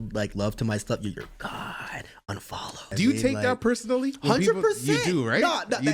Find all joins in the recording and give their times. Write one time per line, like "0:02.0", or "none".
0:02.9